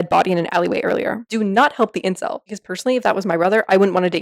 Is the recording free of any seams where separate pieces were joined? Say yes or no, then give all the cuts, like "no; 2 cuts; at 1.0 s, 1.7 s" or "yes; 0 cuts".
no; 2 cuts; at 1.2 s, 2.5 s